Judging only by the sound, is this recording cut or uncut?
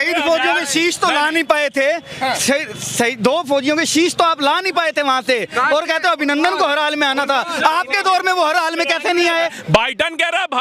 cut